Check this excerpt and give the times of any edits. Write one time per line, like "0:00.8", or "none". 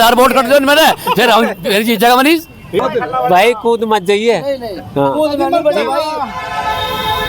0:02.8